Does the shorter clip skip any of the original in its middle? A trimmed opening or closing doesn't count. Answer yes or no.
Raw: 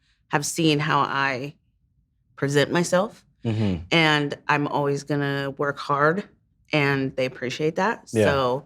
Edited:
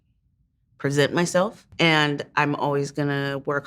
yes